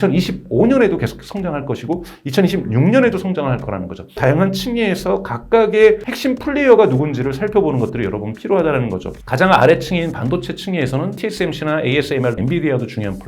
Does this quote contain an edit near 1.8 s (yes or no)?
no